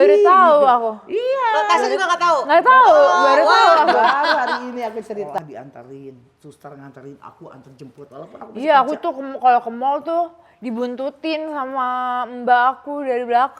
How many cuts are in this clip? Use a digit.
1